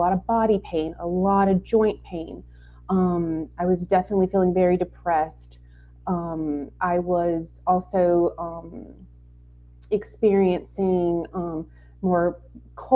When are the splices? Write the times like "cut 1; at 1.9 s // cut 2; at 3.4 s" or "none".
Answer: none